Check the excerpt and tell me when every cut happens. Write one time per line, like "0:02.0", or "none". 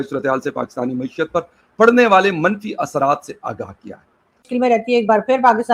0:04.4